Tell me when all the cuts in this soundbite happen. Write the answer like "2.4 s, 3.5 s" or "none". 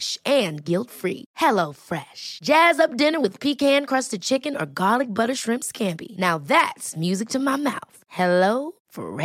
none